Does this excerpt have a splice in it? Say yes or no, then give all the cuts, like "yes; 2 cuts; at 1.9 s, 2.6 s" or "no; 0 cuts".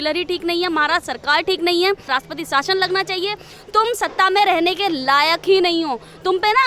yes; 1 cut; at 2.0 s